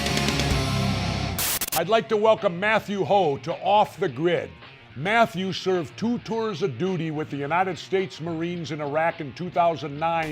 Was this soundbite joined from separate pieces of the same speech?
yes; 1 cut; at 1.3 s

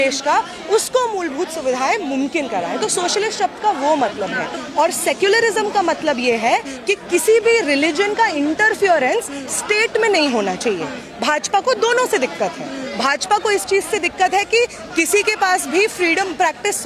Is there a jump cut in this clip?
yes; 1 cut; at 4.5 s

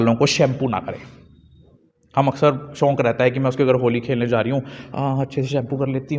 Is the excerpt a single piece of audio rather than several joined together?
yes; 0 cuts

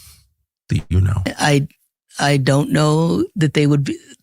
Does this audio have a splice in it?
yes; 1 cut; at 1.3 s

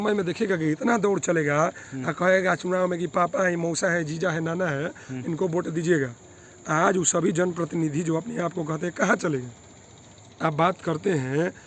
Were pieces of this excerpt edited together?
no; 0 cuts

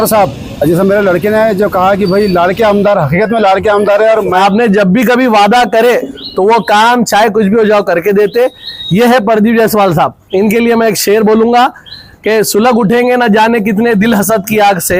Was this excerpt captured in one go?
no; 1 cut; at 4.4 s

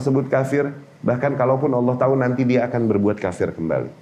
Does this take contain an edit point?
no; 0 cuts

